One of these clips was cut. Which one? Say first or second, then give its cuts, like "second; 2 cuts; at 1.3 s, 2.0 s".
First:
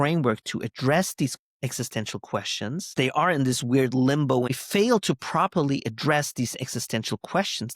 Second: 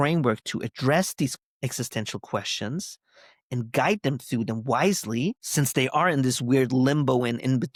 first; 2 cuts; at 2.9 s, 4.6 s